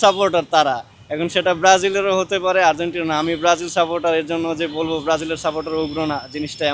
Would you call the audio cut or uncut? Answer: uncut